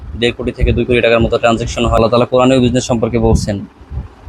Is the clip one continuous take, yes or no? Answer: no